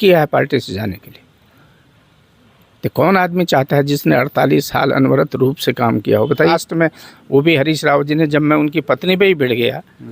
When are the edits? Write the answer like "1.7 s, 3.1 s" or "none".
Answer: 6.5 s